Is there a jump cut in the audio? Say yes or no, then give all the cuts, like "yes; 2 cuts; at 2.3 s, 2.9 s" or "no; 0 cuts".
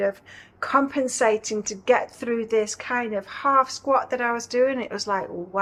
no; 0 cuts